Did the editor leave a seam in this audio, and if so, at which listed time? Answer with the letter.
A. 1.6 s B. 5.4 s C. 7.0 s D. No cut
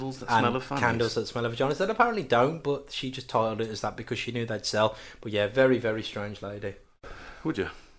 C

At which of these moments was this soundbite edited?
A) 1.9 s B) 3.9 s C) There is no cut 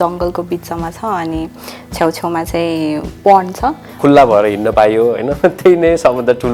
B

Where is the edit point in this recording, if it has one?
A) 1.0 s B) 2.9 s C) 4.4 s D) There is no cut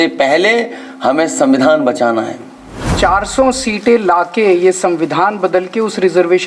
B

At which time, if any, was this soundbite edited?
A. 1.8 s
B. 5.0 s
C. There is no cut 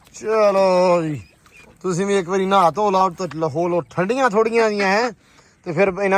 C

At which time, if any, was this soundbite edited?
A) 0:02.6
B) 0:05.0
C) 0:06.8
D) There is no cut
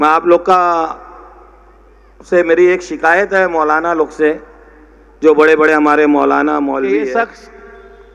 C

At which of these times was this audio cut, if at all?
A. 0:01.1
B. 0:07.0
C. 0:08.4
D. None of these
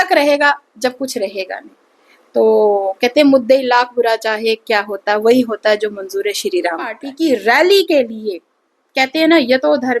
B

